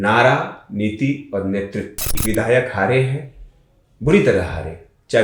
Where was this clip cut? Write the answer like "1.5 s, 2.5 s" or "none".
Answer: 2.1 s